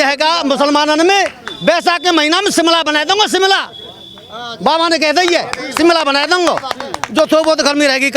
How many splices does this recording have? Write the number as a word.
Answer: zero